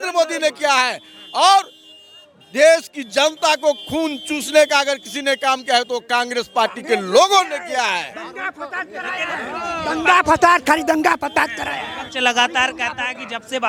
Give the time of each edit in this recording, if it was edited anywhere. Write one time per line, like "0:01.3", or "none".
none

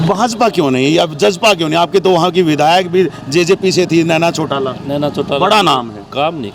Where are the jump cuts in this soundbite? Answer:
none

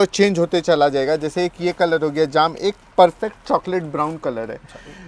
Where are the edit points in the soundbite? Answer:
none

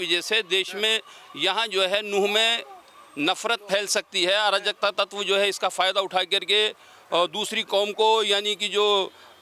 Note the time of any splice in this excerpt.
none

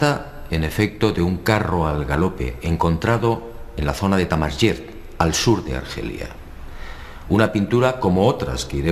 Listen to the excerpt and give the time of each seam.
0:08.0

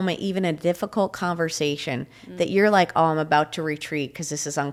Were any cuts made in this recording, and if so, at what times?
none

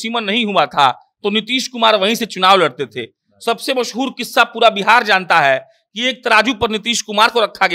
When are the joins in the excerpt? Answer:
none

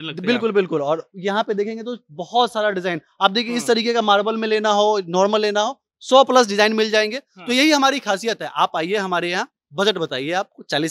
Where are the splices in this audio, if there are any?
none

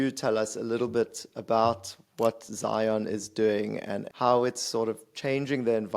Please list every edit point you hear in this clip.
0:04.1

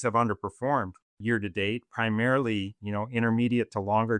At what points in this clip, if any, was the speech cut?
0:01.0

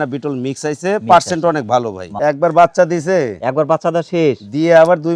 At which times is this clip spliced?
0:02.0

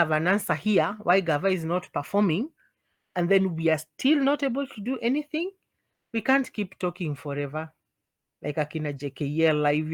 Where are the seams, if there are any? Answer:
none

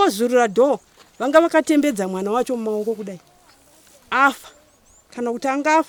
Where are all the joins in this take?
none

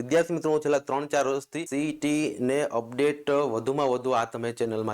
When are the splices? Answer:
0:01.7

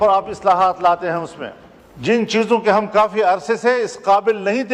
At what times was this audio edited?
none

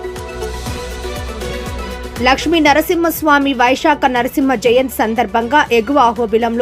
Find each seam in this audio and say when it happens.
0:00.9
0:02.1

